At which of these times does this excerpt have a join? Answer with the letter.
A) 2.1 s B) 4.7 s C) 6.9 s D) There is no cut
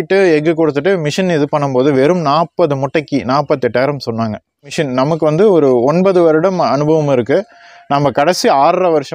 B